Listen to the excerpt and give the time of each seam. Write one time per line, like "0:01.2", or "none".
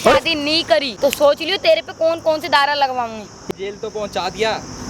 0:00.9
0:03.5